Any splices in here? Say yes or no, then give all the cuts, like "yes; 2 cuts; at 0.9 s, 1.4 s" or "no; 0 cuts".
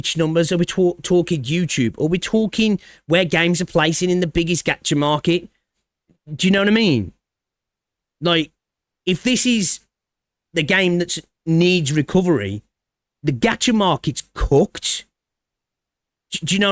no; 0 cuts